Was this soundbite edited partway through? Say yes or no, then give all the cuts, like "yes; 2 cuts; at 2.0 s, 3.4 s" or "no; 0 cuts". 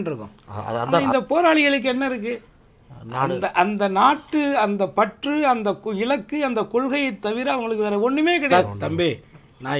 yes; 2 cuts; at 1.0 s, 8.5 s